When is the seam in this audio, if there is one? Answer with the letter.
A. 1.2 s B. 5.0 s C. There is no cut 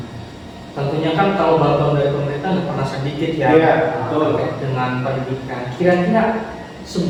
C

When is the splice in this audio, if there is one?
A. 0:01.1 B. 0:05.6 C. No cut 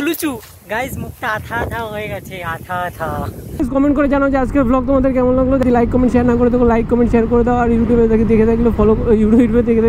B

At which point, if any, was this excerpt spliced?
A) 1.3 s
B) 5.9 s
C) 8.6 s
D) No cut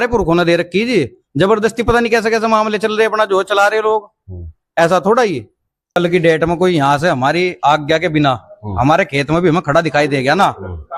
B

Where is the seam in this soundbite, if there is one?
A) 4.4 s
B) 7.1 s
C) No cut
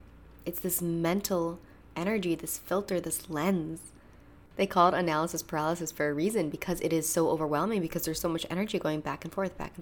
A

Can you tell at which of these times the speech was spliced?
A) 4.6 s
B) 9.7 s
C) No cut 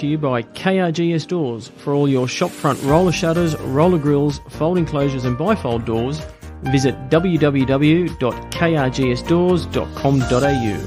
C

